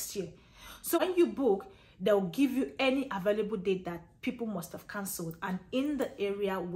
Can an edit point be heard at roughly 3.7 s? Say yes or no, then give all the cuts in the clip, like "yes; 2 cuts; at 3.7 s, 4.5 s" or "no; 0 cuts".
no; 1 cut; at 1.0 s